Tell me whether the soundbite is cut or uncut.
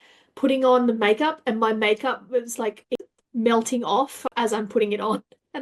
cut